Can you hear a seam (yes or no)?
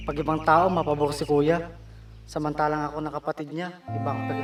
no